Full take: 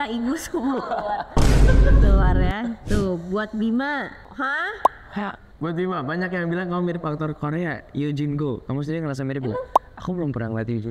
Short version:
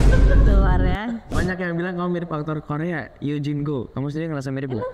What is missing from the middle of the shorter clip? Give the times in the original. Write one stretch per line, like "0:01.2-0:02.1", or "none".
0:02.8-0:06.0